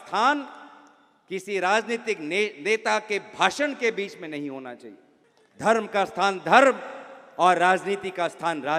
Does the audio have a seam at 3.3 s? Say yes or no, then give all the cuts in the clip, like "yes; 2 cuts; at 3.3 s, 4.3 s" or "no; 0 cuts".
no; 0 cuts